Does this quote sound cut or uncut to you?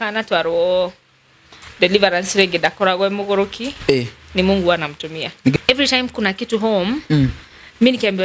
cut